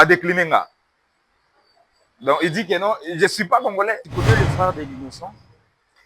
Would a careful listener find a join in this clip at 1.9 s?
no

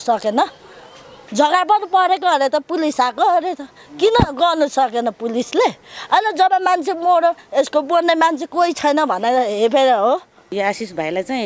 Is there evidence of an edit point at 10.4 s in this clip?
yes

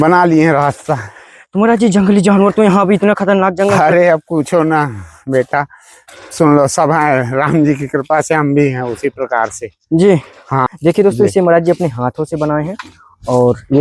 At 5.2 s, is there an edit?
no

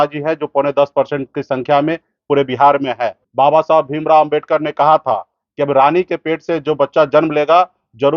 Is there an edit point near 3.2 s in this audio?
yes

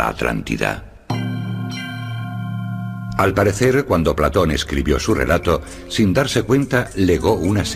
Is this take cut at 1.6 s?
yes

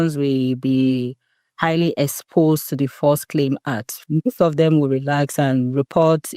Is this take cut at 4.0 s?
yes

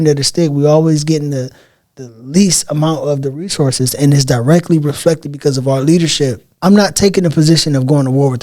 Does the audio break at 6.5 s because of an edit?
yes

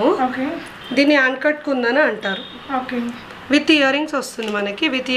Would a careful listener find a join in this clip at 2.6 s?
no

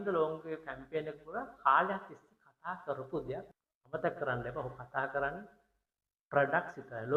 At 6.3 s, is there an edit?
no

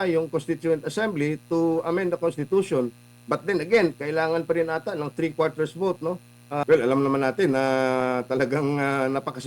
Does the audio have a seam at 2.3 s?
no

